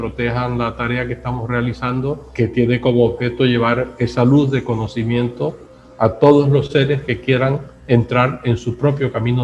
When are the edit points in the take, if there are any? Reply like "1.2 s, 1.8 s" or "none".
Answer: 2.3 s